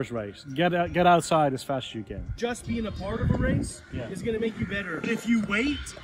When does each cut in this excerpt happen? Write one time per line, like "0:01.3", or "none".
0:02.4
0:05.1